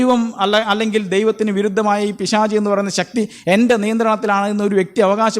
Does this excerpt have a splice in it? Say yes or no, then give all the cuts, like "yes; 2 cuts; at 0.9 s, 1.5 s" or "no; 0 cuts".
no; 0 cuts